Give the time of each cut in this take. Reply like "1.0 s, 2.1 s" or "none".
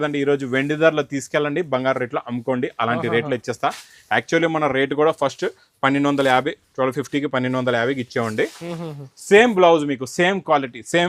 none